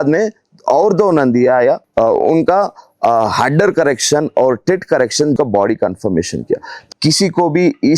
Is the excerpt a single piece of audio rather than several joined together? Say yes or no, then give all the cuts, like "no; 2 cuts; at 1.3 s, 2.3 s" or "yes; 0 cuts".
no; 3 cuts; at 1.8 s, 5.4 s, 6.8 s